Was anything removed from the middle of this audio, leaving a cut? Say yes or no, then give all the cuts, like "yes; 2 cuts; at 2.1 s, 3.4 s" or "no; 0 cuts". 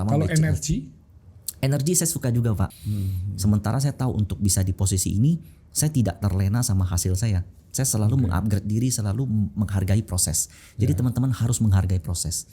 yes; 1 cut; at 2.7 s